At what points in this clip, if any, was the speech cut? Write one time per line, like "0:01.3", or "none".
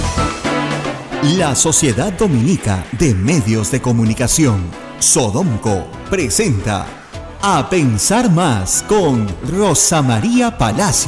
0:01.0

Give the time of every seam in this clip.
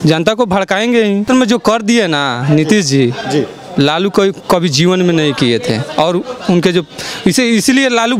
0:01.3

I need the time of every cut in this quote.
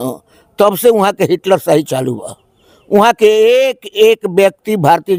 none

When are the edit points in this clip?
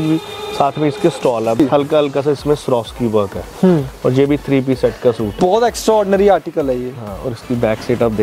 0:01.6
0:05.4

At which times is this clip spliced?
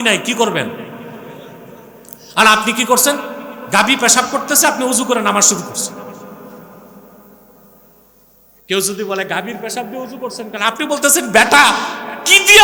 none

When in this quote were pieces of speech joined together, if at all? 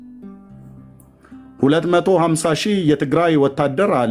0:01.5

